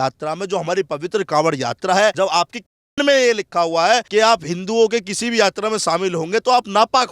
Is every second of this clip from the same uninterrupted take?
no; 2 cuts; at 2.1 s, 4.1 s

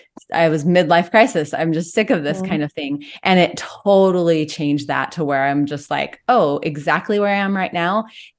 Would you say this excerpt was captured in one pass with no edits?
yes; 0 cuts

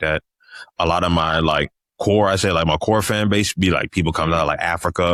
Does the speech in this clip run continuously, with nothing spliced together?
yes; 0 cuts

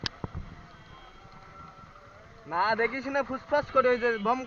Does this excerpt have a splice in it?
no; 0 cuts

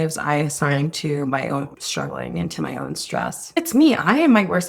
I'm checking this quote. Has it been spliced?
yes; 2 cuts; at 1.8 s, 3.6 s

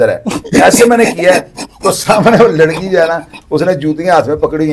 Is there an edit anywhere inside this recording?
no; 0 cuts

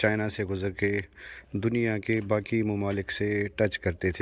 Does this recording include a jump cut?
no; 0 cuts

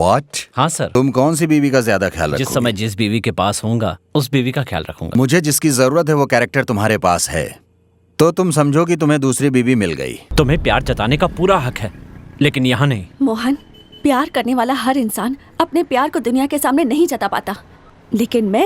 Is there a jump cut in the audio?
yes; 3 cuts; at 1.0 s, 5.2 s, 10.2 s

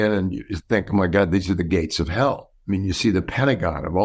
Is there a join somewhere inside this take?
no; 0 cuts

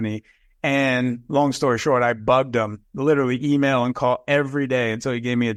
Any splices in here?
no; 0 cuts

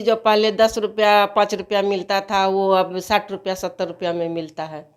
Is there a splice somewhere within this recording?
no; 0 cuts

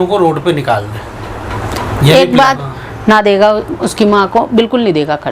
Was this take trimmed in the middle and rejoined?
yes; 1 cut; at 2.6 s

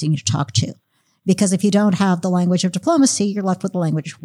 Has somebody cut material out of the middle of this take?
no; 0 cuts

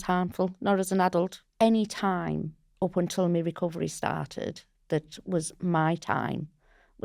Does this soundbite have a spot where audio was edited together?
yes; 2 cuts; at 1.4 s, 2.6 s

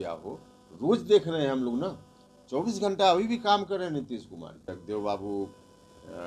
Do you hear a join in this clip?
yes; 1 cut; at 4.7 s

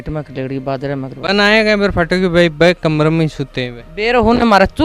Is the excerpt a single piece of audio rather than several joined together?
no; 1 cut; at 1.1 s

